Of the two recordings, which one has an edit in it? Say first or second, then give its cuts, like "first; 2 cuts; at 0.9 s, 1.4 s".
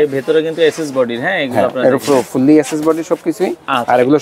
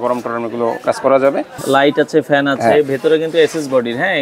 second; 1 cut; at 1.6 s